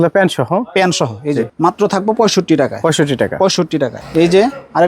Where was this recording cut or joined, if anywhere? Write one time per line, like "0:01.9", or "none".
0:01.5